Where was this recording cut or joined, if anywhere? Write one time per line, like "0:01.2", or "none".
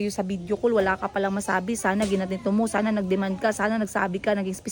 none